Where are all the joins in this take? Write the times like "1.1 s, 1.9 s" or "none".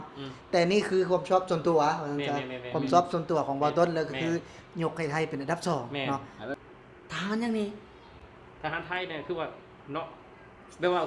6.5 s